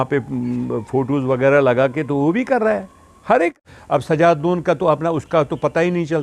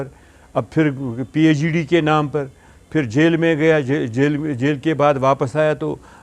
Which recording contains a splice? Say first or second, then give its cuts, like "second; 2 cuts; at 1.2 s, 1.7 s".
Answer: first; 1 cut; at 3.5 s